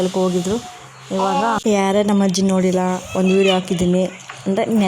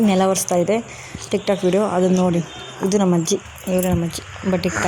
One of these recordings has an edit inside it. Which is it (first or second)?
first